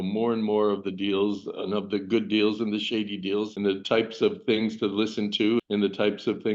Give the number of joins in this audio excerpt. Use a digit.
2